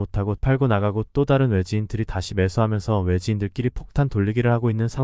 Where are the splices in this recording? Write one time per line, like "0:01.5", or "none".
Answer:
none